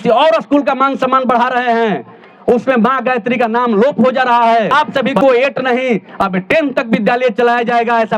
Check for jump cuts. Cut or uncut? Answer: cut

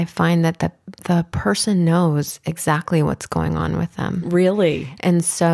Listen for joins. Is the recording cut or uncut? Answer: uncut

